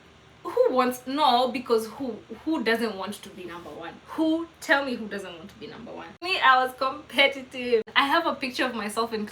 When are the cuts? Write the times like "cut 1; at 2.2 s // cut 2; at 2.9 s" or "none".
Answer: cut 1; at 6.2 s // cut 2; at 7.9 s